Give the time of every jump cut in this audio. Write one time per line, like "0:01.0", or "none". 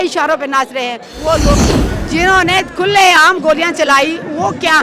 0:01.5